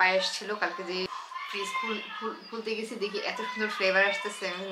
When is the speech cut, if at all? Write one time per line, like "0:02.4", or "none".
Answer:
0:01.1

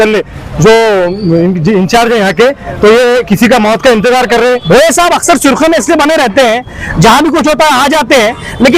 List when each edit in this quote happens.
0:04.6

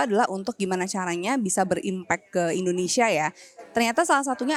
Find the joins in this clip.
none

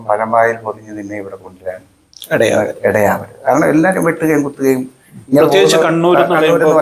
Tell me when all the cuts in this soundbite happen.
none

